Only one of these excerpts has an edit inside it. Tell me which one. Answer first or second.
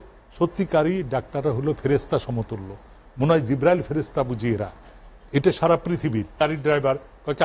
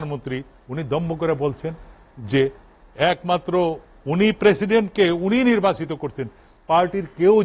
first